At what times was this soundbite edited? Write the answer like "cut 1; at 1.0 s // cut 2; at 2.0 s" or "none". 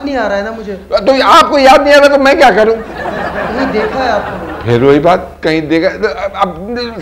none